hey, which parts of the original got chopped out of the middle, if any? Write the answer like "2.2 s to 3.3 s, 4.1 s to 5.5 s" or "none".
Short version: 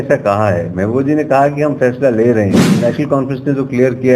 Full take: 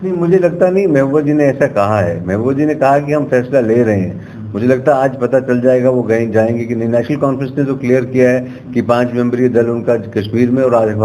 4.2 s to 6.8 s